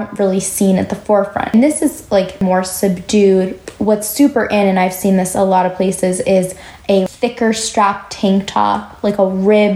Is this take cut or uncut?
cut